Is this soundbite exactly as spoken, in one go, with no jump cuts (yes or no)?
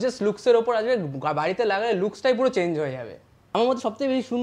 no